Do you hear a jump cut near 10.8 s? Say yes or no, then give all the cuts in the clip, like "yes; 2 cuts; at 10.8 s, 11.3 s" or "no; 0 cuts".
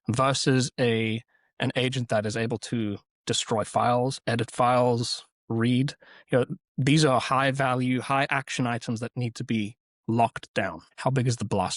yes; 1 cut; at 10.8 s